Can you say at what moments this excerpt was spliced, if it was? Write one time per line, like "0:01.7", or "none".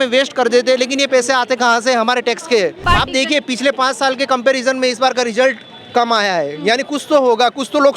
0:02.8